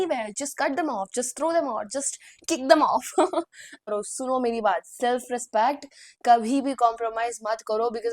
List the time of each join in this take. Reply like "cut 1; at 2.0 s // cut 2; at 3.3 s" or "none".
cut 1; at 3.9 s